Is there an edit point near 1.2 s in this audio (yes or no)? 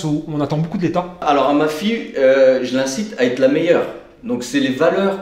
yes